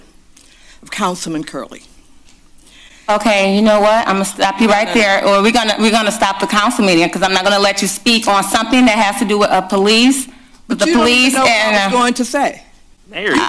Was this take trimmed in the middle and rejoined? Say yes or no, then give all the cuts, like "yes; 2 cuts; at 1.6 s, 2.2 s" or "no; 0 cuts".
no; 0 cuts